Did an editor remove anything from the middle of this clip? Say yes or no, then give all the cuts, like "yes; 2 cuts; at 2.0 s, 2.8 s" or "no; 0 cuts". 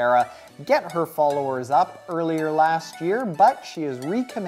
no; 0 cuts